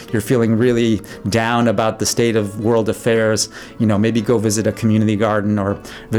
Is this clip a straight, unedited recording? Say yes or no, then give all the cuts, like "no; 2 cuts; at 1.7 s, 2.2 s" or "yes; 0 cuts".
yes; 0 cuts